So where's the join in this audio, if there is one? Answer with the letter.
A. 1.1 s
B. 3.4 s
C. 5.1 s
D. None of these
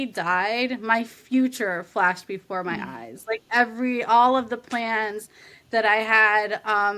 D